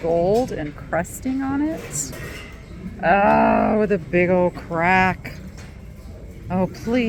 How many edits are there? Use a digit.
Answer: 0